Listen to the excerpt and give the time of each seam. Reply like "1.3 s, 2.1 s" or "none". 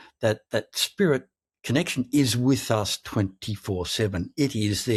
none